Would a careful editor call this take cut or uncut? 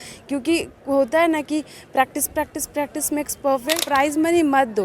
cut